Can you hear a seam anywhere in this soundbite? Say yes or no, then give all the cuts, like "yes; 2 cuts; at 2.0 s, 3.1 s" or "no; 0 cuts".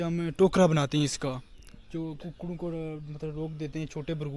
no; 0 cuts